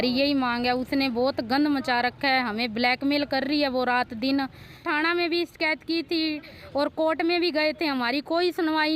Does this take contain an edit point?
yes; 1 cut; at 4.8 s

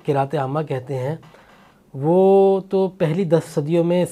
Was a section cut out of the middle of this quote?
no; 0 cuts

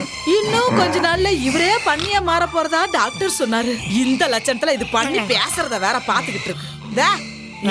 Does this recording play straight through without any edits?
yes; 0 cuts

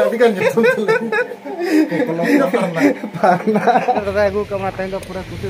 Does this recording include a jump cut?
yes; 1 cut; at 4.0 s

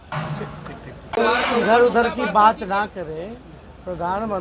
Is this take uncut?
no; 1 cut; at 1.2 s

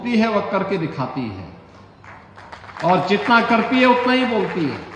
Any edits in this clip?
no; 0 cuts

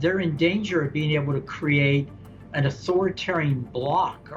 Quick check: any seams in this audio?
no; 0 cuts

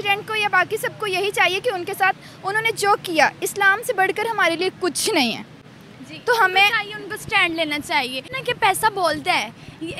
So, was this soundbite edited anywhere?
yes; 1 cut; at 8.3 s

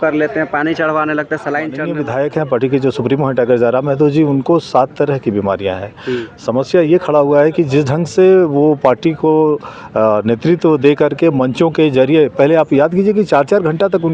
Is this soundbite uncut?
no; 1 cut; at 1.9 s

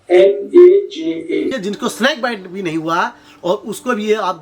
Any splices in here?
yes; 1 cut; at 1.5 s

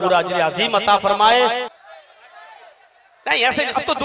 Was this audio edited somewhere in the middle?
yes; 1 cut; at 1.7 s

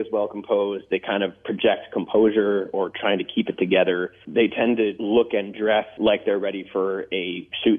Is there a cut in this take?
yes; 3 cuts; at 4.2 s, 5.0 s, 5.9 s

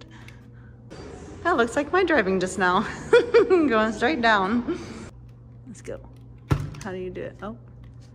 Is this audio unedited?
no; 2 cuts; at 0.9 s, 5.1 s

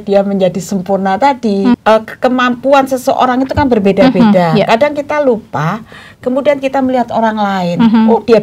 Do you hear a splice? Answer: yes; 1 cut; at 1.8 s

